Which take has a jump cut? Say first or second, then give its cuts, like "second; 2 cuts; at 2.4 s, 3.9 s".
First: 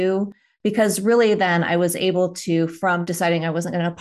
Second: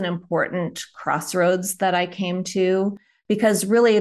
first; 1 cut; at 3.0 s